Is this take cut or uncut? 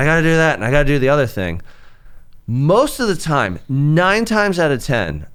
uncut